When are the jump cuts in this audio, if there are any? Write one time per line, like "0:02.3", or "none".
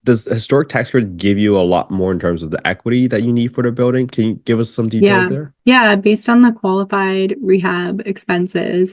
none